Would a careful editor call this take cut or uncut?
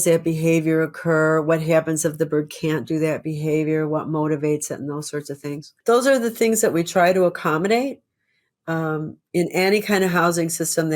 cut